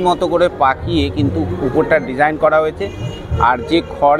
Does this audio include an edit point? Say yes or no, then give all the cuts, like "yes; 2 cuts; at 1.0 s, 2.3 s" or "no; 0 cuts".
no; 0 cuts